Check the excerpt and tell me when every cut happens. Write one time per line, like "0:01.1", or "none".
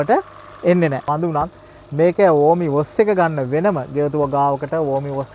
0:01.0